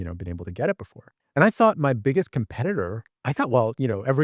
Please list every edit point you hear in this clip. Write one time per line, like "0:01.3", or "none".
none